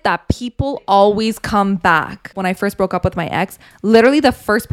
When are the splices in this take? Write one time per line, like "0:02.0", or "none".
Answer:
0:02.3